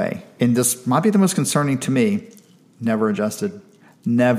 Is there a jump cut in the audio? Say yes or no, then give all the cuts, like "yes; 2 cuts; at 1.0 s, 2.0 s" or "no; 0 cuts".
no; 0 cuts